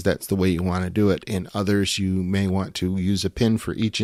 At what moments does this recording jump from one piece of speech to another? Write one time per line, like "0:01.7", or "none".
none